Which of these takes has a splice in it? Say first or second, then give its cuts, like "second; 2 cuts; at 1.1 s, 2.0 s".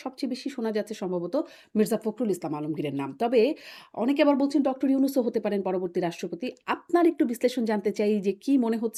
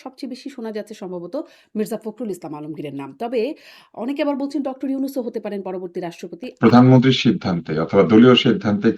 second; 1 cut; at 6.5 s